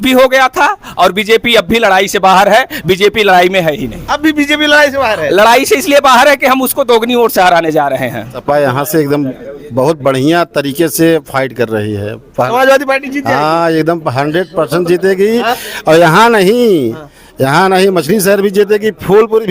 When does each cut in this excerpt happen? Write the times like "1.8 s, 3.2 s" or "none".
8.4 s